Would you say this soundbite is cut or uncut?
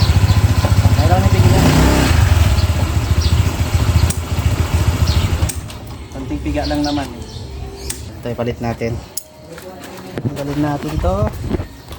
cut